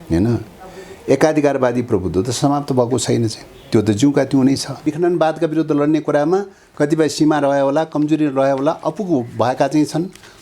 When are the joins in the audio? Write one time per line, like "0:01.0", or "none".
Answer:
0:04.8